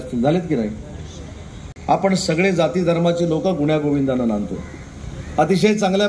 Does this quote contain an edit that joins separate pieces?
no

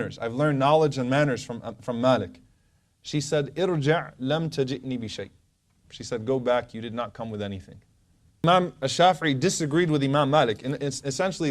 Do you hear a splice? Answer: yes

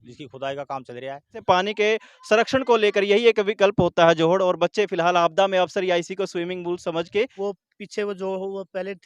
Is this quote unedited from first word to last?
no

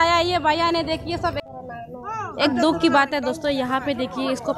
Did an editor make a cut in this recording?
yes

